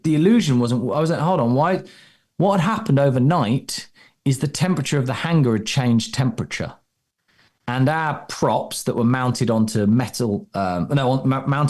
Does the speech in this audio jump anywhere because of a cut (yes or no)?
no